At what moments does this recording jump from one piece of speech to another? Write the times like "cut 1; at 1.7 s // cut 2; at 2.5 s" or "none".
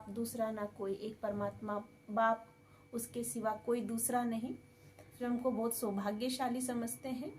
cut 1; at 5.2 s